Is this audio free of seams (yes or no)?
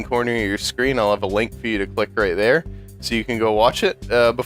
yes